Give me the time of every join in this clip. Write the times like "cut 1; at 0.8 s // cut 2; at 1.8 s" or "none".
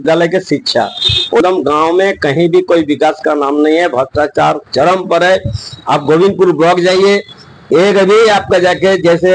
cut 1; at 1.4 s